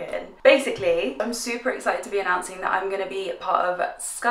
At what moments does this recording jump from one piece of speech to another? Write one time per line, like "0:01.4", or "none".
none